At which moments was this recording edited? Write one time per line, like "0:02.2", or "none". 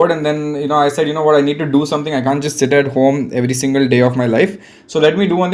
none